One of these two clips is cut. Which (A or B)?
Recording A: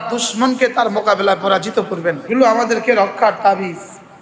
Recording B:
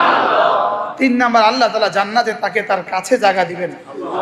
A